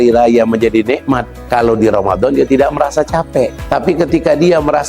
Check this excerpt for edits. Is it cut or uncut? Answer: cut